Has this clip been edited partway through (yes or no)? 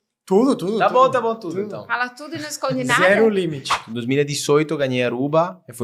yes